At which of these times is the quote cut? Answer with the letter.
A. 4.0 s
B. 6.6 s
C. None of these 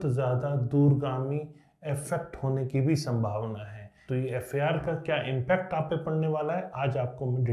A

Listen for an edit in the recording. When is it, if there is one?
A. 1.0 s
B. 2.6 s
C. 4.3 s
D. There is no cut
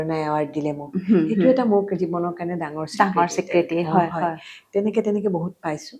D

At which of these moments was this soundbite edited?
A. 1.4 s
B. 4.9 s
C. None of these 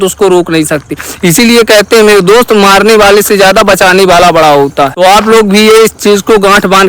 B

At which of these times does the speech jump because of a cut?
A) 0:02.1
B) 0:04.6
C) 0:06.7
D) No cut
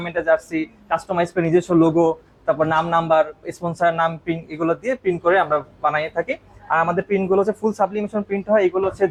D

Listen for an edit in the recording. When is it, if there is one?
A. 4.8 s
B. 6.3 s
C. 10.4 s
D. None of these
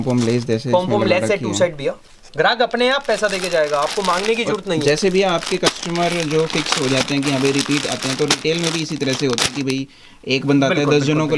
D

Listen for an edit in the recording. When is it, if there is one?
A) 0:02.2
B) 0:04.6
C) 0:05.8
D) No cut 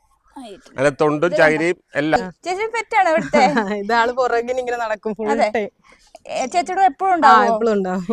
A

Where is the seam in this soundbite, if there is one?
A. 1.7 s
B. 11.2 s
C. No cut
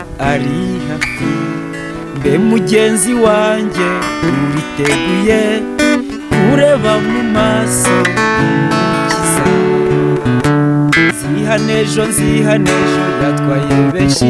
B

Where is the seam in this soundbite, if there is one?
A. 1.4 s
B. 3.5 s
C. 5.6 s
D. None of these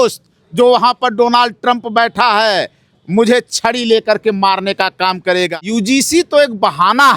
C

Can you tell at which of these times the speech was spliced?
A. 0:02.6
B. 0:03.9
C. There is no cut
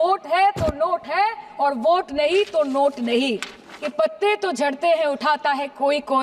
B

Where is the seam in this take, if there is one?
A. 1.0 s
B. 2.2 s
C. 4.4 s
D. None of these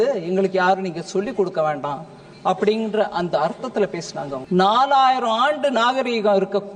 C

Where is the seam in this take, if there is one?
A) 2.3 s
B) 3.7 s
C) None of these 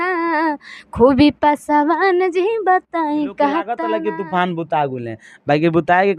B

